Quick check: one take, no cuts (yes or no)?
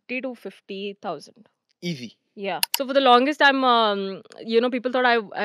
no